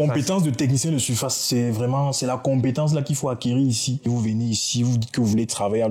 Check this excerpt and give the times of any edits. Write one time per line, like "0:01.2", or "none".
0:04.1